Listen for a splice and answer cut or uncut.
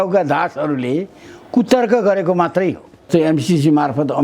cut